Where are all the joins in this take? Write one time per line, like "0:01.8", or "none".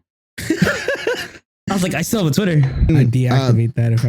0:02.9

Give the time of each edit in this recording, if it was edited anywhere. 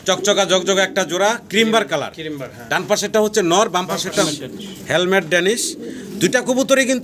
0:04.2

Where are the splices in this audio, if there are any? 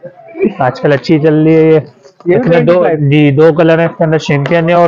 none

